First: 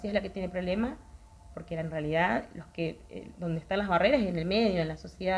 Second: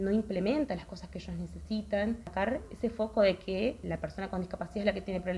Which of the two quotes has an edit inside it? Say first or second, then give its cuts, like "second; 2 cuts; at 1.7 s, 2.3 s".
second; 2 cuts; at 2.3 s, 3.8 s